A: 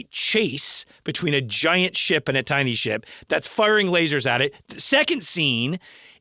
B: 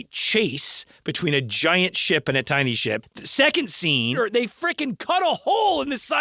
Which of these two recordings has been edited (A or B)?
B